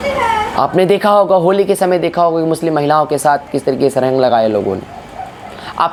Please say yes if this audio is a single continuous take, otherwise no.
yes